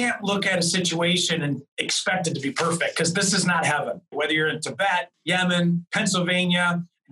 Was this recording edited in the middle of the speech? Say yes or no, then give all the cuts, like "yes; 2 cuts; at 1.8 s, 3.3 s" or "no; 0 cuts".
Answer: yes; 3 cuts; at 4.1 s, 5.1 s, 5.9 s